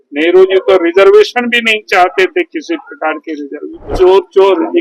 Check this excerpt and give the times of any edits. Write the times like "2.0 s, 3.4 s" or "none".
3.8 s